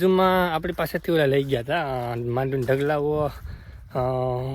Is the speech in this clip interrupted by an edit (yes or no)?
no